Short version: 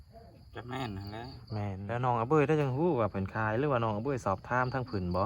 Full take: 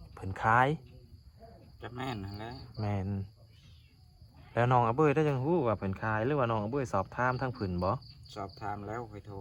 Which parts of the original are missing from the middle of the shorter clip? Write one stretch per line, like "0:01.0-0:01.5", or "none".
0:03.1-0:04.5